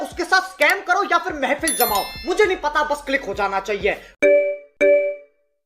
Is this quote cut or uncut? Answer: cut